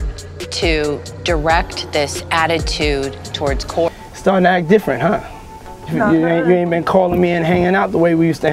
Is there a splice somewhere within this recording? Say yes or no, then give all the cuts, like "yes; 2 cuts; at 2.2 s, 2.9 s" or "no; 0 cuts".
yes; 1 cut; at 3.9 s